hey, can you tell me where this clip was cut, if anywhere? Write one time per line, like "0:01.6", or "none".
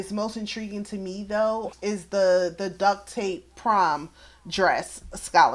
none